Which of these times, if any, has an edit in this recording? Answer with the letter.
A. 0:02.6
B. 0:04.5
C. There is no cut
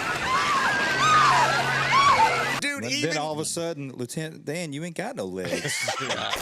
A